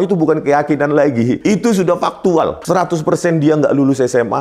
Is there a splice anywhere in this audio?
yes; 2 cuts; at 1.4 s, 2.6 s

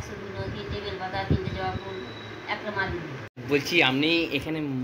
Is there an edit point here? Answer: yes; 1 cut; at 3.2 s

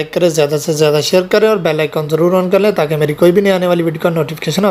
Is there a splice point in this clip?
no; 0 cuts

